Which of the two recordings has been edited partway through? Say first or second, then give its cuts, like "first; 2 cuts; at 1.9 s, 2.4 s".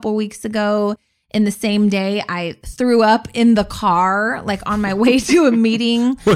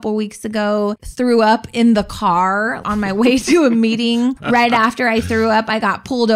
second; 3 cuts; at 1.0 s, 2.8 s, 4.4 s